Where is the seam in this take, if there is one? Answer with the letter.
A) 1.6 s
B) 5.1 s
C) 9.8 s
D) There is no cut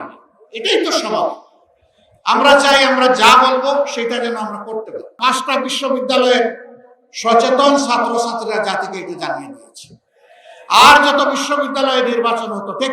B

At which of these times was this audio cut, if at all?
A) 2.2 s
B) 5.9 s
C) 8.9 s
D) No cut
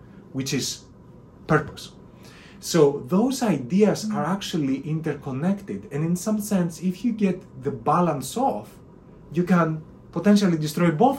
D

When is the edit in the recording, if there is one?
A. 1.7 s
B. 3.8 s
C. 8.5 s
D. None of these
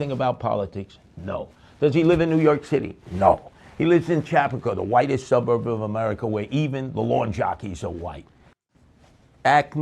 C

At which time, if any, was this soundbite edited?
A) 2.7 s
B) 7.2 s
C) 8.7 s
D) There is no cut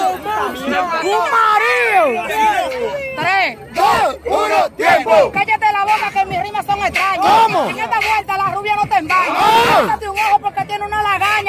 A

